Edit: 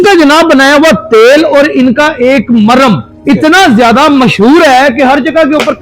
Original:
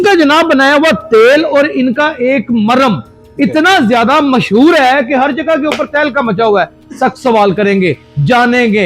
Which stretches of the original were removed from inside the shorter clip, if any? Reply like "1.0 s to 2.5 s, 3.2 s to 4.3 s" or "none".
3.1 s to 3.2 s